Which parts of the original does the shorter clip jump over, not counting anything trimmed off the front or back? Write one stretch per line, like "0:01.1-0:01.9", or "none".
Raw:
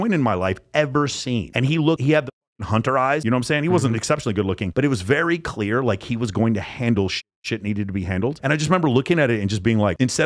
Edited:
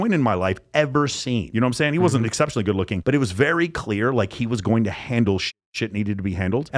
0:01.5-0:03.2